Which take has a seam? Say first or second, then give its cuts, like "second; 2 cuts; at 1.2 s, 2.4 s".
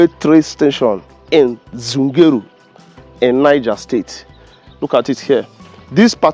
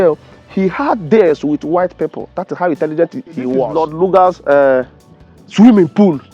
second; 1 cut; at 3.8 s